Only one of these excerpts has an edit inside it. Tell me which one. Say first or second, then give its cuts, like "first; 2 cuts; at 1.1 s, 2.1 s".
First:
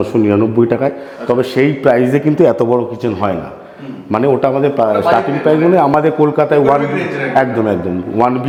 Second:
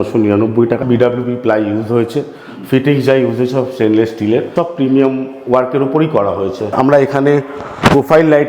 second; 3 cuts; at 0.8 s, 4.5 s, 6.7 s